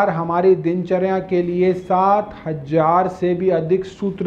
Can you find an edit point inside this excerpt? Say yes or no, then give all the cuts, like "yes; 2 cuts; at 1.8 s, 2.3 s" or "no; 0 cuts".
no; 0 cuts